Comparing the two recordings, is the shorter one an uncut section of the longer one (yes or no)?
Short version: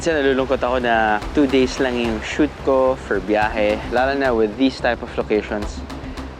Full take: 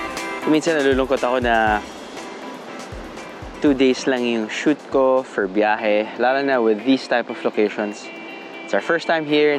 no